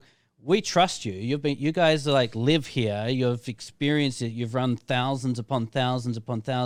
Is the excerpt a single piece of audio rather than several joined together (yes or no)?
yes